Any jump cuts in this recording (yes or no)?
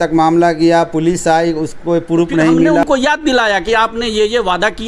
yes